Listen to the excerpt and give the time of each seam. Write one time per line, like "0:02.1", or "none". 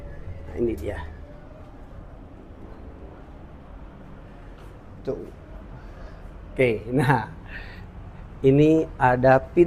none